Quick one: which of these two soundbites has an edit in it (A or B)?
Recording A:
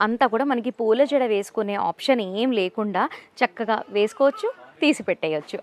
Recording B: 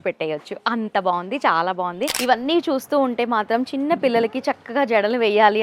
B